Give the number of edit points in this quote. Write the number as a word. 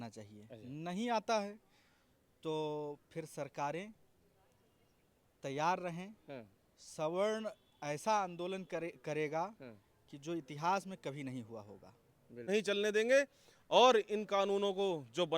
one